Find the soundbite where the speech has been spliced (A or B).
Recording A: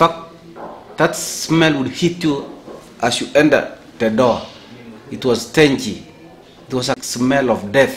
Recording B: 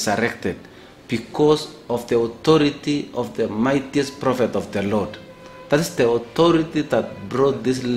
A